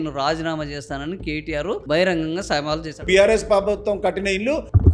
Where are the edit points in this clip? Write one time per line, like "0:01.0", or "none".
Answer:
0:03.1